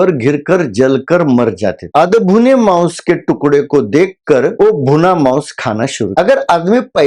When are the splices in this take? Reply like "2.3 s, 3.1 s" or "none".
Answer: 1.8 s, 4.5 s, 6.1 s